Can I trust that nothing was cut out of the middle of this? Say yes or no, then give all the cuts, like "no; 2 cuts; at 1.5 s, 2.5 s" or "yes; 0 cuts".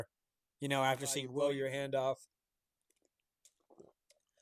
no; 1 cut; at 1.3 s